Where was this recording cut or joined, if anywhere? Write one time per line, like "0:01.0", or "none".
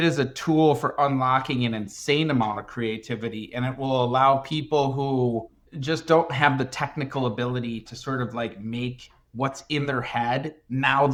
none